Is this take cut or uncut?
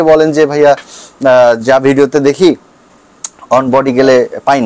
uncut